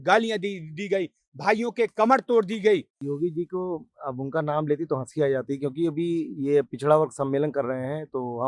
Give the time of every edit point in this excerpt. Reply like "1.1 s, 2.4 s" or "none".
3.0 s